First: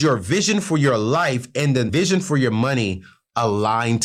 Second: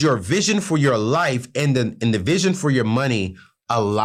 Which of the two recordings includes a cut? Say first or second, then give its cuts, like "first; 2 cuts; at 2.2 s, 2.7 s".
first; 1 cut; at 1.9 s